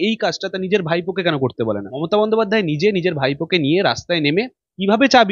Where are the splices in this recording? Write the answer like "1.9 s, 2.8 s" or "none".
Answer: 1.9 s